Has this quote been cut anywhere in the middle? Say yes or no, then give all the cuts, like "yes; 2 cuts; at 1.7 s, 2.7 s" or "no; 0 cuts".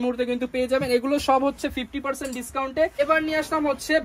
yes; 1 cut; at 3.0 s